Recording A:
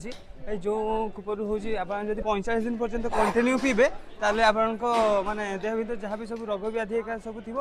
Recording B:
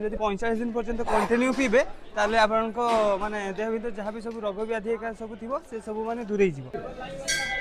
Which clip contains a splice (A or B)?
B